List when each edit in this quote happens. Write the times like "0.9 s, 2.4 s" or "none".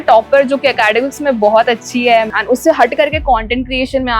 2.3 s